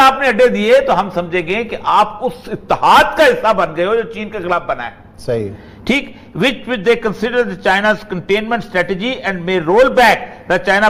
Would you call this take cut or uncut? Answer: uncut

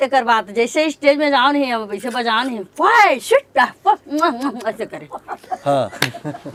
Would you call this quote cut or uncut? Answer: uncut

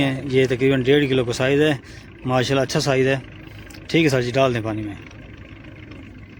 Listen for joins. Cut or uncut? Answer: uncut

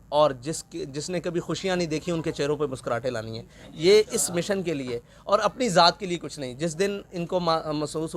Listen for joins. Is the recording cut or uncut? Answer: uncut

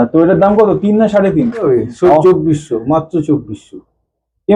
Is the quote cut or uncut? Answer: cut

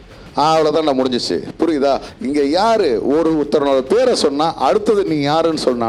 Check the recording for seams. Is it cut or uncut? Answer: uncut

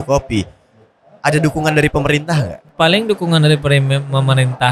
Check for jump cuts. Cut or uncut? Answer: cut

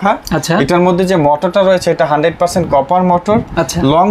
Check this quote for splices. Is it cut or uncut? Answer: uncut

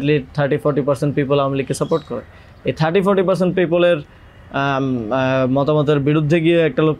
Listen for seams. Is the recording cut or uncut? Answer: uncut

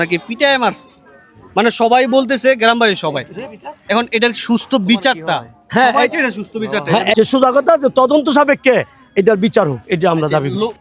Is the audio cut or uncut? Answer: cut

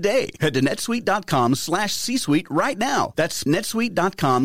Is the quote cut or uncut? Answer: cut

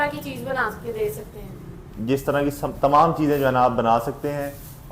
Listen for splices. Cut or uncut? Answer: uncut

